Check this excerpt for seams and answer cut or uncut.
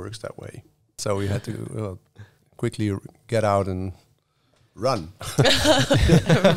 cut